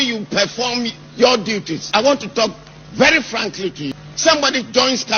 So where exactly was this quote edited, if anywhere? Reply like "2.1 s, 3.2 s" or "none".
1.9 s, 3.9 s